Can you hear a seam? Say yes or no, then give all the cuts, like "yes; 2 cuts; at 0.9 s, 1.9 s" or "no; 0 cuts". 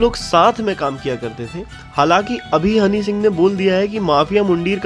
no; 0 cuts